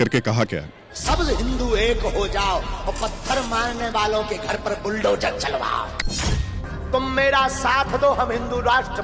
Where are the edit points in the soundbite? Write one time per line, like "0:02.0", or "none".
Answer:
none